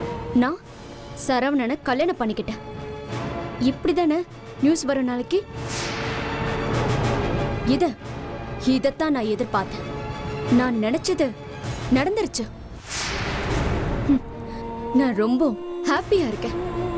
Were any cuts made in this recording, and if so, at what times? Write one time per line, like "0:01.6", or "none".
none